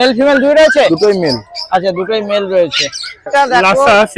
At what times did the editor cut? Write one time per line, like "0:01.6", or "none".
0:03.2